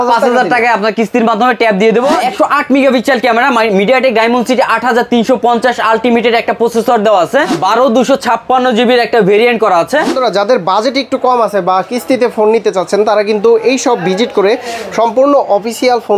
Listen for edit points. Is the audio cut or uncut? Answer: cut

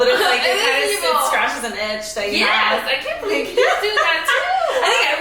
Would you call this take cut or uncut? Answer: uncut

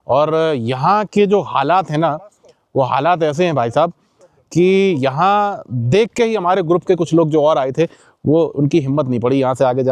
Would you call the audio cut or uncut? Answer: uncut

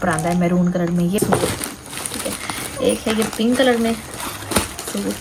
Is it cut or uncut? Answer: cut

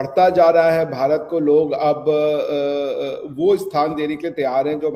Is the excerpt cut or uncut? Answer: uncut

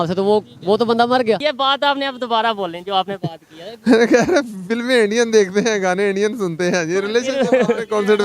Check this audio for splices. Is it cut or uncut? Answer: cut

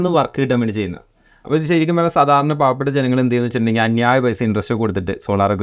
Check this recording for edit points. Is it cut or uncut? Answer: uncut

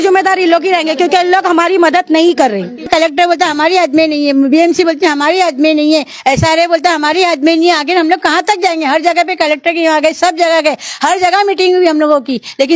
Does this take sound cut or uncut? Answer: cut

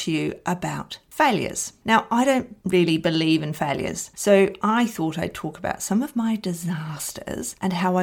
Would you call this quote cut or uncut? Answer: cut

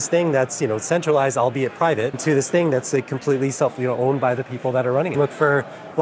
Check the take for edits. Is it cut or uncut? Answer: cut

